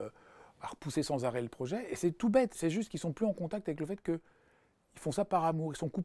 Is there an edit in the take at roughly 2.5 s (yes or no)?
yes